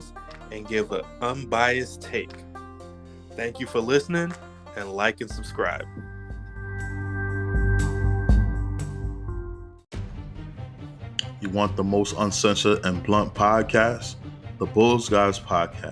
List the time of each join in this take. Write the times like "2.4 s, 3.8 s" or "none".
9.7 s

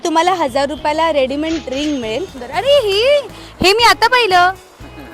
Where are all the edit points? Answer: 2.4 s

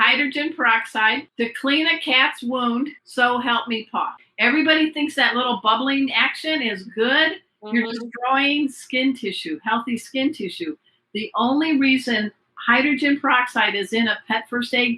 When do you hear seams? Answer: 1.3 s, 3.0 s, 4.2 s

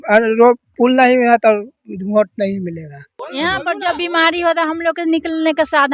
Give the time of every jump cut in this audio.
3.2 s

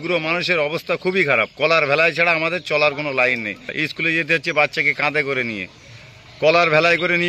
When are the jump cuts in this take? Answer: 3.7 s

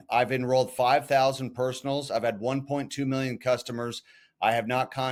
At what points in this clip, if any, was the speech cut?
none

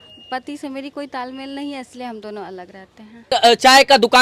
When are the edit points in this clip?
3.3 s

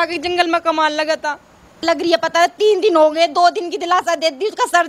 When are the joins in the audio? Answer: 1.7 s

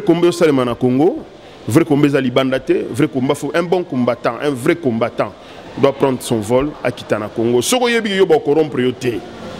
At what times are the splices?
none

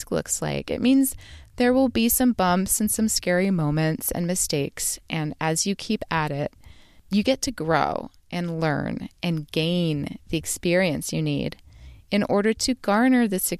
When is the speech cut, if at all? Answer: none

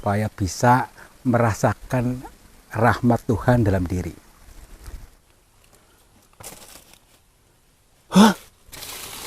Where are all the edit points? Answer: 5.1 s

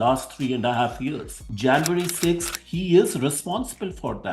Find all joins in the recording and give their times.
1.5 s

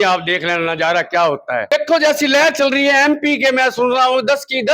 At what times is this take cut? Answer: 1.6 s

